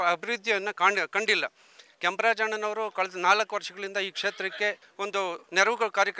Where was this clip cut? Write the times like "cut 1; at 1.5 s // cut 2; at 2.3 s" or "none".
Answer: cut 1; at 4.9 s